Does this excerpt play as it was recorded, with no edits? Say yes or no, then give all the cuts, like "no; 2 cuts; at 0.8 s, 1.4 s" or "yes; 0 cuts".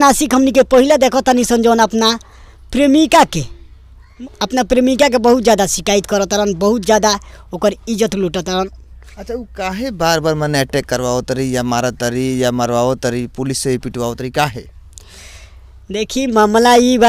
yes; 0 cuts